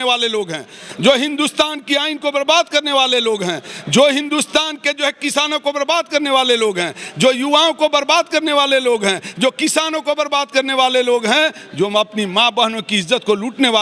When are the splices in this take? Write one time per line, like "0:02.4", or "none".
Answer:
none